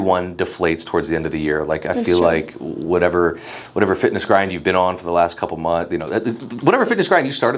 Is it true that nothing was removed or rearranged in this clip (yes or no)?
yes